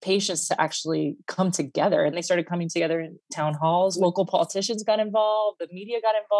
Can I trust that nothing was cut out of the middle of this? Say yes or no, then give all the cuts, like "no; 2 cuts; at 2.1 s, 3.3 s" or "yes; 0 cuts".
no; 1 cut; at 3.9 s